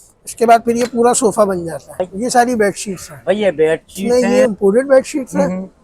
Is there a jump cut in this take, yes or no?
yes